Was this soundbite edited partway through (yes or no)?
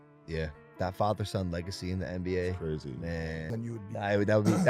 yes